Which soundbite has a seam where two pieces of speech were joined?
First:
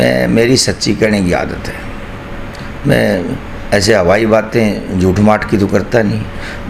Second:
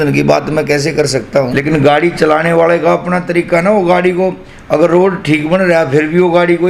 second; 1 cut; at 1.5 s

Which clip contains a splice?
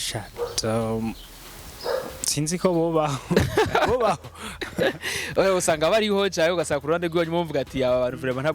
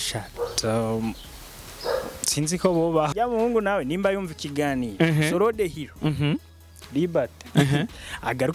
second; 1 cut; at 3.1 s

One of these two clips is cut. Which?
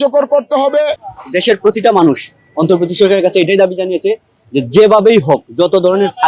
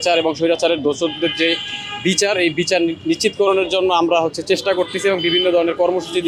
first; 1 cut; at 1.0 s

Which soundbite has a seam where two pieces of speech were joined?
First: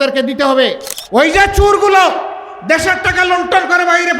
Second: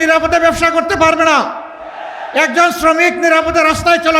first; 1 cut; at 0.9 s

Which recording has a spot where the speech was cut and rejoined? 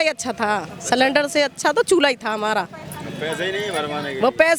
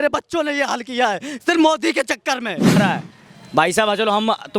second; 1 cut; at 2.8 s

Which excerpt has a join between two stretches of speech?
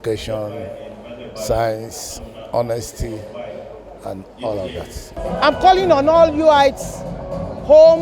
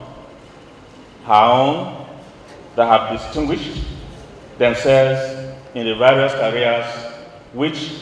first; 1 cut; at 5.1 s

